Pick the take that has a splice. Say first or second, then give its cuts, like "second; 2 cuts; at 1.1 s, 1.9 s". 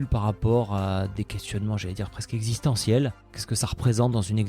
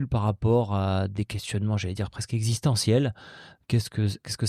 first; 1 cut; at 3.4 s